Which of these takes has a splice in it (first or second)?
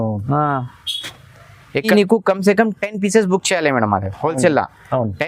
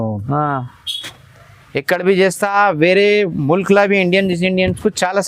first